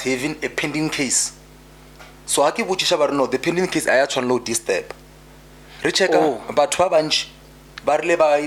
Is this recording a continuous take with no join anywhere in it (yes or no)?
yes